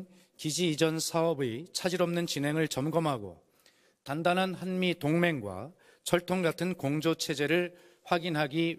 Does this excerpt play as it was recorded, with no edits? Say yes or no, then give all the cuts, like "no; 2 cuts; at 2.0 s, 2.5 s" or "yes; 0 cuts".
yes; 0 cuts